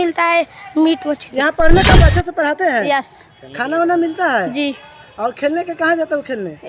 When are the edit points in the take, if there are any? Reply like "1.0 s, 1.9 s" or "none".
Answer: 2.0 s